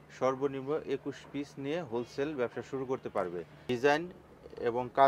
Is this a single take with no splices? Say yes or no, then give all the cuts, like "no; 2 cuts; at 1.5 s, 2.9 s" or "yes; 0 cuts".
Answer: no; 1 cut; at 3.7 s